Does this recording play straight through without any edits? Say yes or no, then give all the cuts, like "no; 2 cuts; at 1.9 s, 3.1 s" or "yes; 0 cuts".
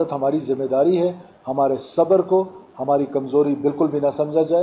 yes; 0 cuts